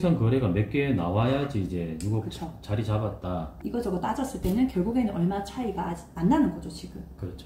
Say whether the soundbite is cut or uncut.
cut